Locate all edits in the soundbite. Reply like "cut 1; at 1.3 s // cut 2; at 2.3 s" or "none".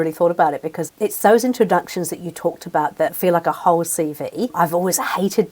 cut 1; at 0.8 s // cut 2; at 3.1 s // cut 3; at 4.5 s